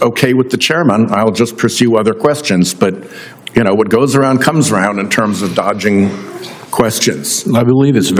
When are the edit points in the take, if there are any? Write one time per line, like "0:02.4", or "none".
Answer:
none